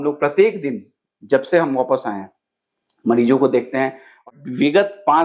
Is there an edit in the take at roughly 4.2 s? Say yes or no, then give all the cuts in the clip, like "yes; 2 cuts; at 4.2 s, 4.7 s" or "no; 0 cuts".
yes; 1 cut; at 4.2 s